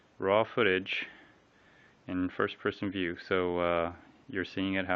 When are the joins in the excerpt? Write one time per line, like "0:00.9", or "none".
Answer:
0:01.0